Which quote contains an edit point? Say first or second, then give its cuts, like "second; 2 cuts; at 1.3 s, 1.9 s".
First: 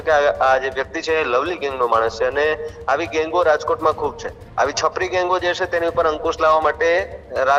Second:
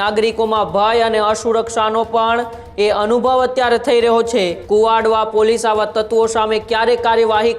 second; 1 cut; at 4.6 s